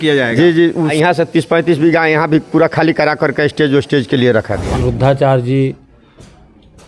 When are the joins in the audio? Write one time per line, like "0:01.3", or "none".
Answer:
0:00.9
0:04.6